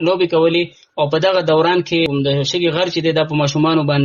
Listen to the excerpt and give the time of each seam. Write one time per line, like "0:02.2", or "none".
0:02.1